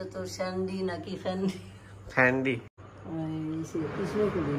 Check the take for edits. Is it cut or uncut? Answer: cut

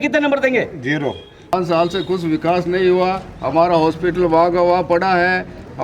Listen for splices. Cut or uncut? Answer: cut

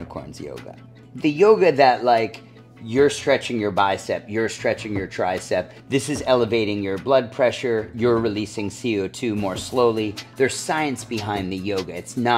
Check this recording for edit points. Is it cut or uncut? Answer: cut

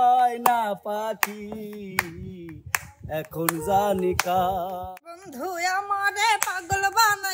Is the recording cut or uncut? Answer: cut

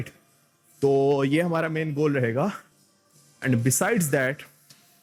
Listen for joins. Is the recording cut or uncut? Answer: uncut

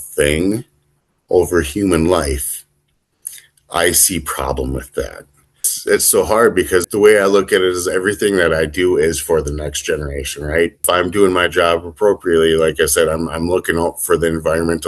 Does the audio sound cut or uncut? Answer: cut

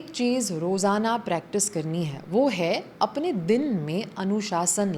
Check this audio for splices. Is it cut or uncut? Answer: uncut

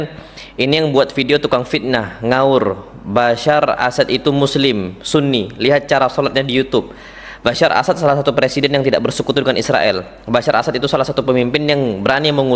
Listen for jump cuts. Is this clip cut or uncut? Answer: uncut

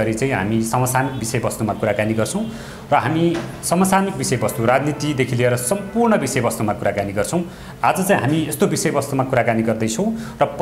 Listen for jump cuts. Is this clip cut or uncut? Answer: uncut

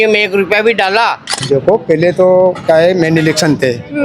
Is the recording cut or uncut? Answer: cut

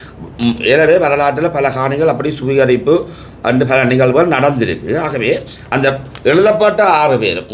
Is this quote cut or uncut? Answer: uncut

